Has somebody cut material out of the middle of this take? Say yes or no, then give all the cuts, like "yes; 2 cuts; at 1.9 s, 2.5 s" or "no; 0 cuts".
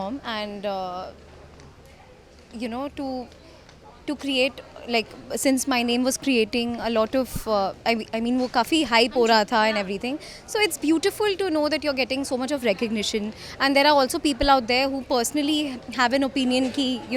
no; 0 cuts